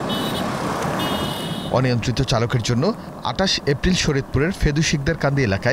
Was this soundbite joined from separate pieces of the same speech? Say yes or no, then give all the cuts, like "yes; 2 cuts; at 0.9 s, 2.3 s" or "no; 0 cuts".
no; 0 cuts